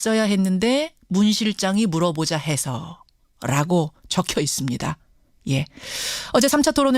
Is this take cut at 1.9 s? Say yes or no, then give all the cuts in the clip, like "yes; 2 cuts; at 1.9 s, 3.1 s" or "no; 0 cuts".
yes; 1 cut; at 1.9 s